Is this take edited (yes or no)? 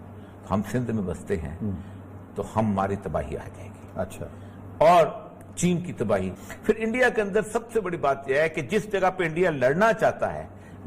yes